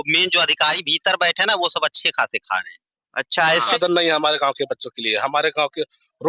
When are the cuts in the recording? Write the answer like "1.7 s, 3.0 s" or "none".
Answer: 3.7 s